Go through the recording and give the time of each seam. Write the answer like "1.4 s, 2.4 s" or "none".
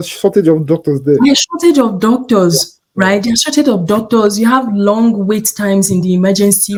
none